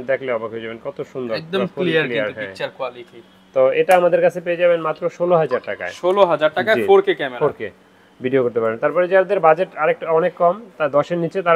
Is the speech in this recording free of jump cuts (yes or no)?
yes